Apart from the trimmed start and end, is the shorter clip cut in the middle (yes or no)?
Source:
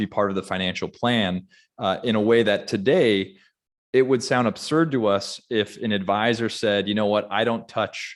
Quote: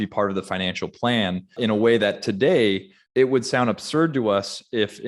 yes